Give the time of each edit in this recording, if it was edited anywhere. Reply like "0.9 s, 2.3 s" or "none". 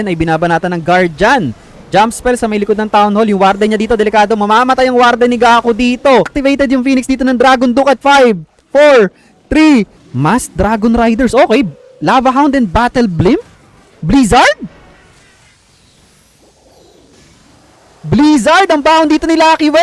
6.3 s, 10.0 s